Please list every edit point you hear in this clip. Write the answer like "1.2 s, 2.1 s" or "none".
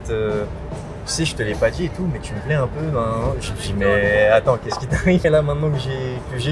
5.2 s